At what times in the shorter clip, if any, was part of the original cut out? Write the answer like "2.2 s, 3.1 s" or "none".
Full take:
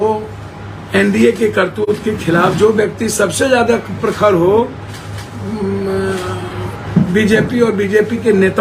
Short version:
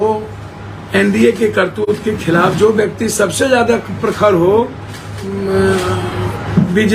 5.3 s